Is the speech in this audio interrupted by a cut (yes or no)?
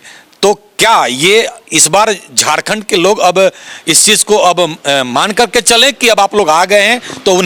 no